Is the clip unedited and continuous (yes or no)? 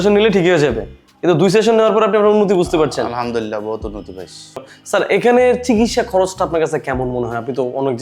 no